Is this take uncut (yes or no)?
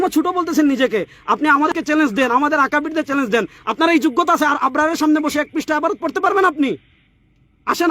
no